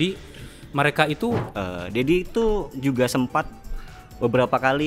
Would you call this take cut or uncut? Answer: cut